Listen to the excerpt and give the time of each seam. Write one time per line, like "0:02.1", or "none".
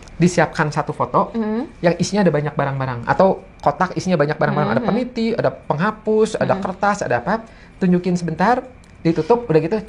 none